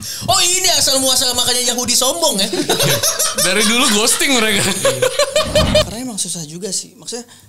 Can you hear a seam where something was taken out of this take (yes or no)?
yes